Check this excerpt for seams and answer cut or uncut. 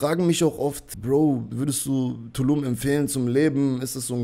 cut